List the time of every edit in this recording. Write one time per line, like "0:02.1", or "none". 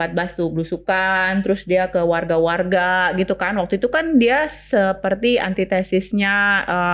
none